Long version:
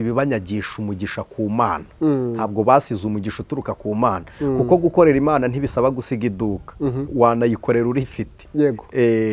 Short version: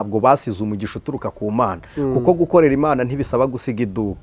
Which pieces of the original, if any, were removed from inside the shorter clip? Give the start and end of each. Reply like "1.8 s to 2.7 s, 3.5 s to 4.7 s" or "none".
none